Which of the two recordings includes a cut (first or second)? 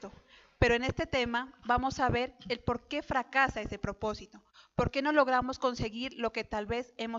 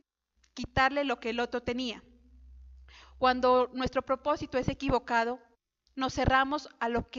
first